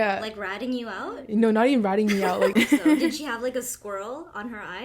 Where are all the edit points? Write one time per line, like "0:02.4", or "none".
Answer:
0:02.5